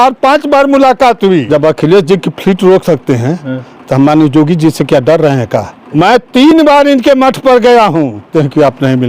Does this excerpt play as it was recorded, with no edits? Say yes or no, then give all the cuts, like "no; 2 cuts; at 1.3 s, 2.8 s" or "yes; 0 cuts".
no; 3 cuts; at 1.4 s, 5.8 s, 8.3 s